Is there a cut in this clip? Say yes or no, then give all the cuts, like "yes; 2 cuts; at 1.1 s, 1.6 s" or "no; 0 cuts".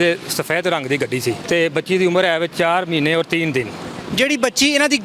yes; 2 cuts; at 1.4 s, 2.5 s